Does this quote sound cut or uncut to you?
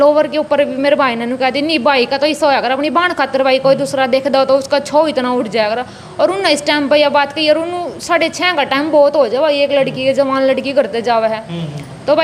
uncut